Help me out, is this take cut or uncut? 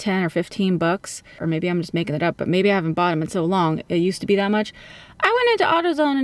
cut